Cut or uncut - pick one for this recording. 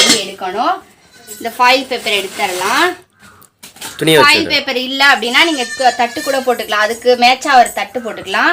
uncut